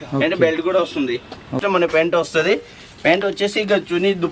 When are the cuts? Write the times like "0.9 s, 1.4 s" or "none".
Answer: 1.6 s

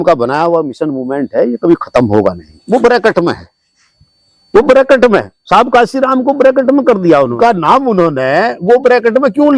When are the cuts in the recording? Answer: 2.5 s, 7.3 s

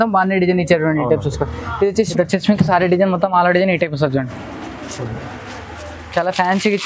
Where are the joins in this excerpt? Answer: 1.9 s

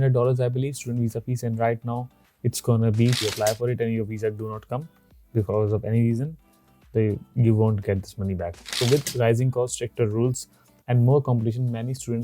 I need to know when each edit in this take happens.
3.2 s, 8.7 s

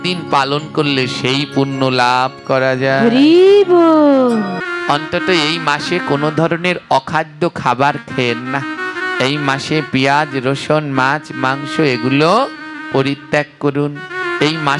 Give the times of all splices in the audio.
4.6 s

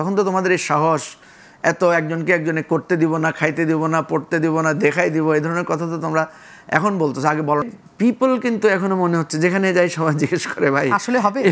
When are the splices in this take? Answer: 7.8 s

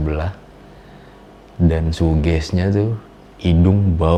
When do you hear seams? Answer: none

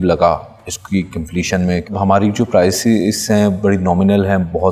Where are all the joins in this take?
1.9 s

